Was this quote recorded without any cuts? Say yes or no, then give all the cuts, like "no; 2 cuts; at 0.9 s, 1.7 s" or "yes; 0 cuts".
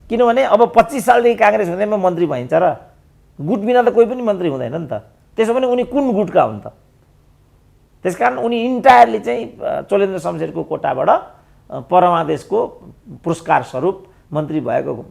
yes; 0 cuts